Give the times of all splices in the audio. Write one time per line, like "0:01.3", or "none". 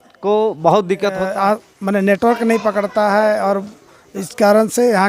0:01.2